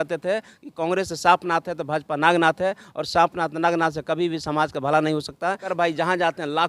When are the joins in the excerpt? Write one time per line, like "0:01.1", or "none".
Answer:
0:05.7